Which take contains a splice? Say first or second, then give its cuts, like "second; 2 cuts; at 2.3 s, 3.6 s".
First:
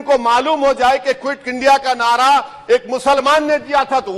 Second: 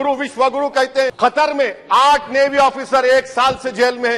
second; 1 cut; at 1.1 s